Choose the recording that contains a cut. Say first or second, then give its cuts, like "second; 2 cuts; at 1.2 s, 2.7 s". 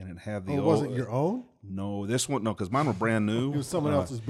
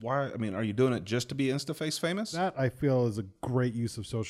second; 1 cut; at 2.3 s